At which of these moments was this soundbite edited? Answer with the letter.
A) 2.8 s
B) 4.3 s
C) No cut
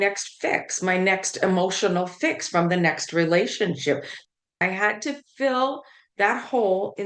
B